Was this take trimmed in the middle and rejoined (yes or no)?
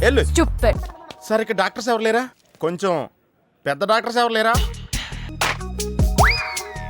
yes